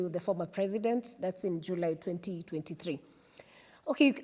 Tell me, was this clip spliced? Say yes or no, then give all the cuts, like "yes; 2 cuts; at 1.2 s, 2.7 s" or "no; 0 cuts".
no; 0 cuts